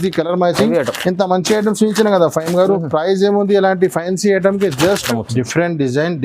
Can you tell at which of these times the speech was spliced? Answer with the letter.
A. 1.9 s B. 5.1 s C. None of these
B